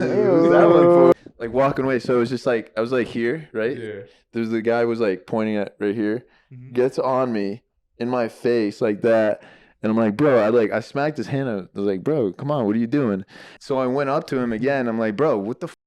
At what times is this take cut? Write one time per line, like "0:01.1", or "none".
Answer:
0:01.1
0:13.3